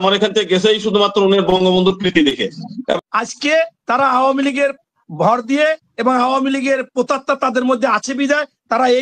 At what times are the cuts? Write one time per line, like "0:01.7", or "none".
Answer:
0:03.0